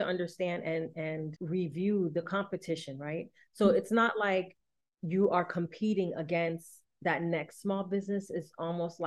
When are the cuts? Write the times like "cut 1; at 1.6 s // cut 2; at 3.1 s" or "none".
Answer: cut 1; at 1.4 s